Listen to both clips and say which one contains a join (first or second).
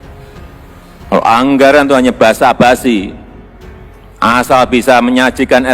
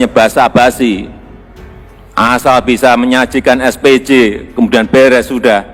first